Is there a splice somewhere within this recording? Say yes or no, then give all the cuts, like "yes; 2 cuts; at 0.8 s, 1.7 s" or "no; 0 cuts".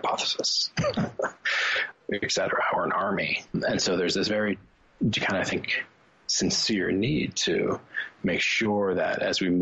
yes; 2 cuts; at 1.8 s, 3.6 s